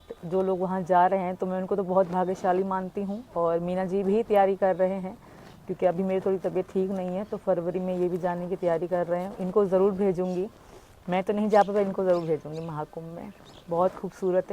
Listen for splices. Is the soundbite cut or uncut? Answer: uncut